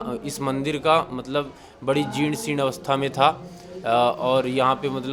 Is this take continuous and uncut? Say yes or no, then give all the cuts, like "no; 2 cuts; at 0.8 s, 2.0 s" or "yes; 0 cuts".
yes; 0 cuts